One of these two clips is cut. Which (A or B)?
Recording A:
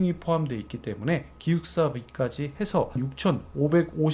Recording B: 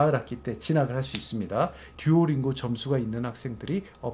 B